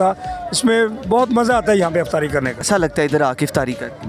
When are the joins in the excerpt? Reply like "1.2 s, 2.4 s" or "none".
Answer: 2.6 s